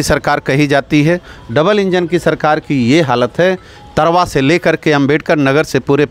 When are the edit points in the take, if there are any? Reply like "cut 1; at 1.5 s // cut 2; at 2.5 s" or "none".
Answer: none